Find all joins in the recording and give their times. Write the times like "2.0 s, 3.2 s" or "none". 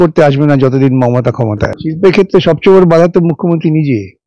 1.7 s